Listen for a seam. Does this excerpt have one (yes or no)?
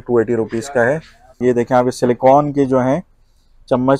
yes